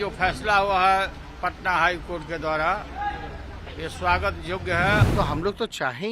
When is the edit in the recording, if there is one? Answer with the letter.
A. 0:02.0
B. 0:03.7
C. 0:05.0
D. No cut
C